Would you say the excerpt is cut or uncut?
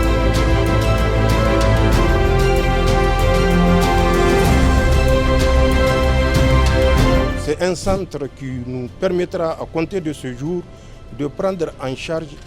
cut